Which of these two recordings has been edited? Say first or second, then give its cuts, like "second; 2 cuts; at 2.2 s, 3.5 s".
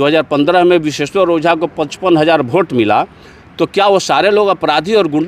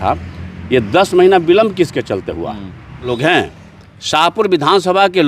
second; 1 cut; at 3.1 s